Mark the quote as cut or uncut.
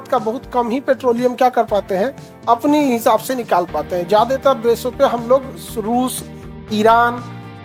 uncut